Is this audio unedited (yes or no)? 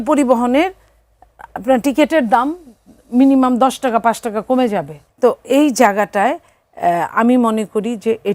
no